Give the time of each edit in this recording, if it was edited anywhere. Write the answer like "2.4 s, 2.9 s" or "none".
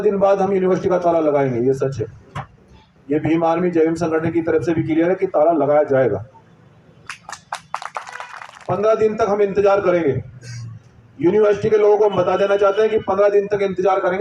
8.3 s

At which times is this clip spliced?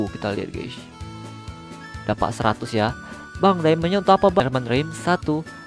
0.7 s, 2.0 s, 4.4 s

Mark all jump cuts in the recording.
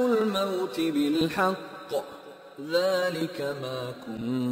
none

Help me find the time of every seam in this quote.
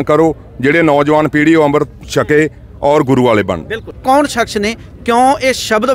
4.0 s

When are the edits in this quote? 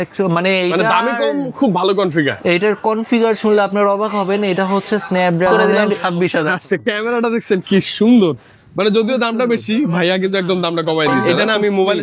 5.5 s, 11.2 s

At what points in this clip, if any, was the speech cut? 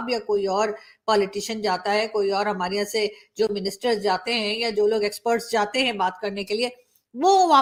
none

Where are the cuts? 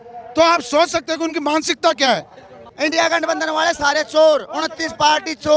2.7 s

